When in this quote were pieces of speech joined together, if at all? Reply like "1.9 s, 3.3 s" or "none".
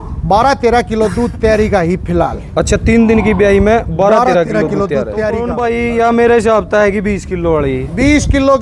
5.5 s